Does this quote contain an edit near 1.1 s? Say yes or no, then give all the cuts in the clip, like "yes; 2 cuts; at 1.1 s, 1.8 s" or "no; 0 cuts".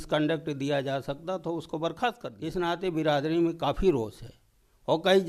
no; 1 cut; at 2.3 s